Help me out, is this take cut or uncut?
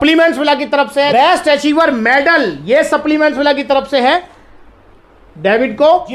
cut